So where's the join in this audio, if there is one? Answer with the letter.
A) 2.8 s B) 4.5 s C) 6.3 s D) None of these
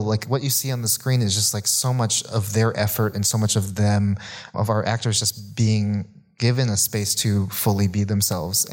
B